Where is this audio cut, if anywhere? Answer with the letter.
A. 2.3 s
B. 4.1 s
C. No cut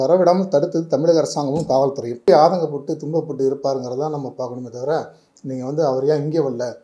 A